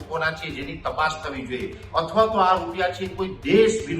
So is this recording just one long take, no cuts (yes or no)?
no